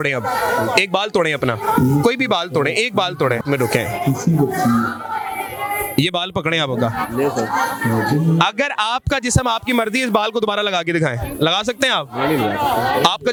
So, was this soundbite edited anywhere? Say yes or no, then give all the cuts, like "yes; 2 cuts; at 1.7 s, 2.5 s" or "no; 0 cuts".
no; 0 cuts